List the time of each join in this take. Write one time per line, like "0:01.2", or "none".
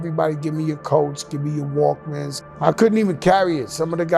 0:02.4